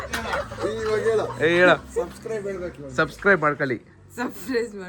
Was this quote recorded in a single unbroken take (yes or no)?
yes